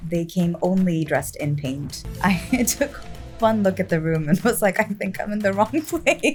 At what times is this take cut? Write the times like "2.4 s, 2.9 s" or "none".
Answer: none